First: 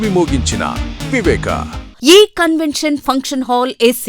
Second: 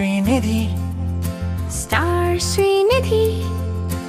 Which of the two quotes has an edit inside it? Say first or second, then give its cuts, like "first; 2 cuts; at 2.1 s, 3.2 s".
first; 1 cut; at 1.8 s